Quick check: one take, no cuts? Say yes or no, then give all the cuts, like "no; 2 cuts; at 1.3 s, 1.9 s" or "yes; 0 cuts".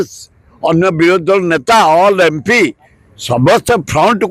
yes; 0 cuts